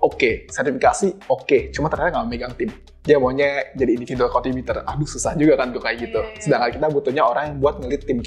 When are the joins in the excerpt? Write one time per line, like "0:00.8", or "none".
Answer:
none

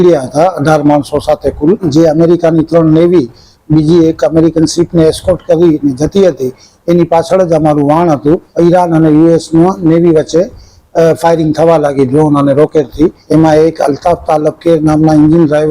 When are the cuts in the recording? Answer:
0:01.8
0:08.5
0:13.2

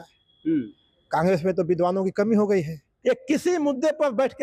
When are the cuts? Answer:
0:02.9

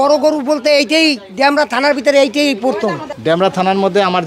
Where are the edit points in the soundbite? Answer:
0:03.1

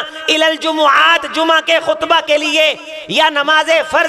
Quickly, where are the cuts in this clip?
none

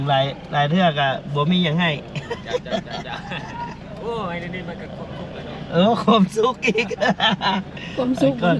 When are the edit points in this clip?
none

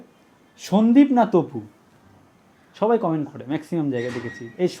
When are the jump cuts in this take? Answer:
none

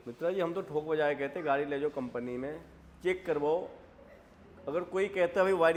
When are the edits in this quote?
none

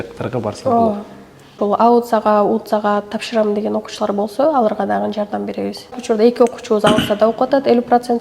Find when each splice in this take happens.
0:01.5
0:06.0

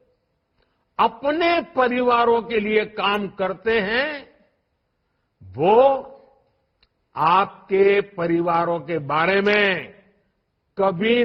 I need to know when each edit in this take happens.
none

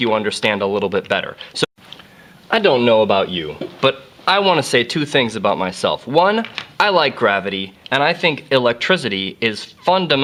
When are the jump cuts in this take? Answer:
none

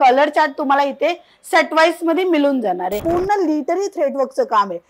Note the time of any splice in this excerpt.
0:03.0

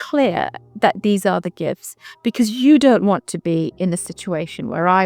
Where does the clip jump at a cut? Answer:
0:01.9

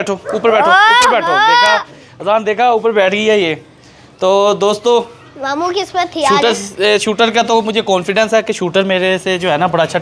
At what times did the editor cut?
none

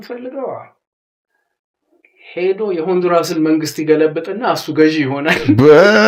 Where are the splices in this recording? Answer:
none

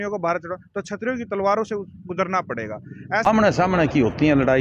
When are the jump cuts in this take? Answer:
0:03.3

